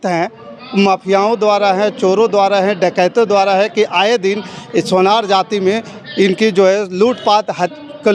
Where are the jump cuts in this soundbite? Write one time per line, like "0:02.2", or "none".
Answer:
none